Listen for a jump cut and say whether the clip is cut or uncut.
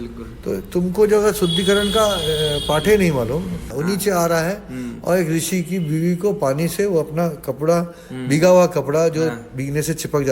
cut